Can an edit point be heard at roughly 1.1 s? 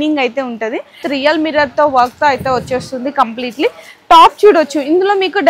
yes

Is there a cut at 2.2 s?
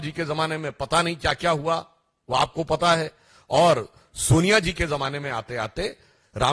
no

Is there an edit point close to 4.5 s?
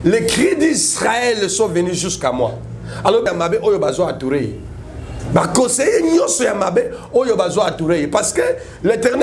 no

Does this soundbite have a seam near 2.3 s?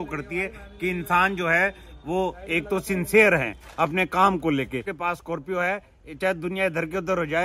no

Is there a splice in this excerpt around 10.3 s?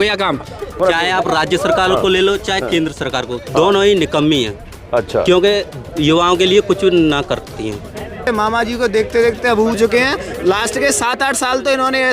no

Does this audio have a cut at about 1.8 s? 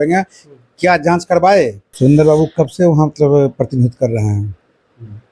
yes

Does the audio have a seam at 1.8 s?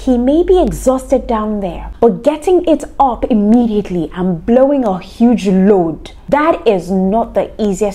yes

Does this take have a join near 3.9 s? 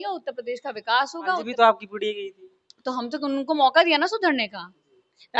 no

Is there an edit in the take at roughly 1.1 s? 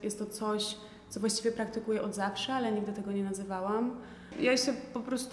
no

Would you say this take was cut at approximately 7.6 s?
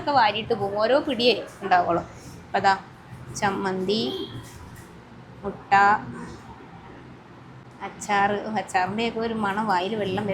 yes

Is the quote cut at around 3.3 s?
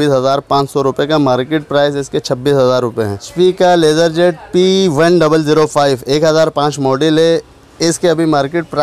yes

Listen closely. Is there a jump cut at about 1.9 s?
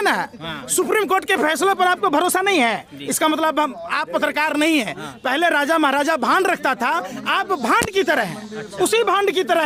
no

